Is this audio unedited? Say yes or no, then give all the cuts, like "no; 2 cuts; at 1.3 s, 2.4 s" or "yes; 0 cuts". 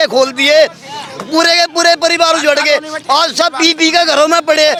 yes; 0 cuts